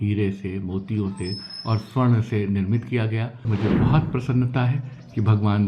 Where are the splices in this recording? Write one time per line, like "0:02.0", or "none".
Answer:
0:03.5